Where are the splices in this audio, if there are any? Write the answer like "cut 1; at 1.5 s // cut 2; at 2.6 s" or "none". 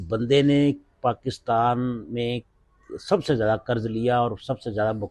none